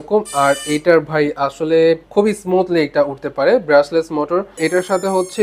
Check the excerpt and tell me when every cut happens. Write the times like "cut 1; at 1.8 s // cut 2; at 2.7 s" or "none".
cut 1; at 2.0 s // cut 2; at 4.6 s

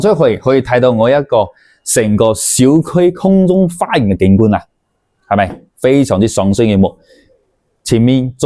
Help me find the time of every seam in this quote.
none

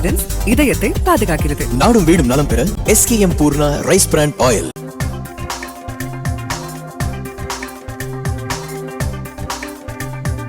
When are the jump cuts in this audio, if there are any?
none

